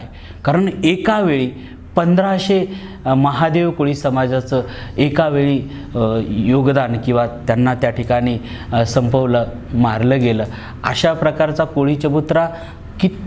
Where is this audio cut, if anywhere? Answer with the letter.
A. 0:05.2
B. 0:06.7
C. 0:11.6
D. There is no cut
D